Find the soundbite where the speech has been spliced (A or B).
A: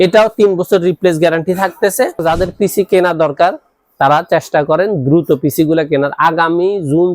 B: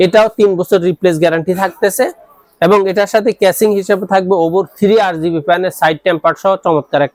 A